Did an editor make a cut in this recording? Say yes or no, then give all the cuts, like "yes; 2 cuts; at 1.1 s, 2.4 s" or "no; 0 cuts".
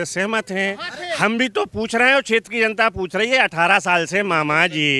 no; 0 cuts